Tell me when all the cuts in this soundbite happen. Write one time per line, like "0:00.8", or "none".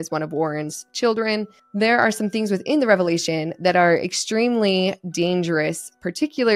0:01.6